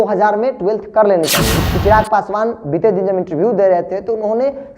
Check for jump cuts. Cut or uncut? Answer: cut